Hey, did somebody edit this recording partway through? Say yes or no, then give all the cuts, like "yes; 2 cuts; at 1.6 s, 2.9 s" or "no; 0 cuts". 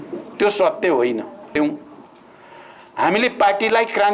yes; 1 cut; at 1.5 s